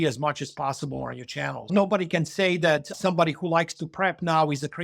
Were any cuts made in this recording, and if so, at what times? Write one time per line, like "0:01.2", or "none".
0:01.7
0:03.0